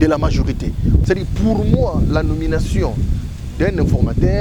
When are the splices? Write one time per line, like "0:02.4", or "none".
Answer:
0:01.0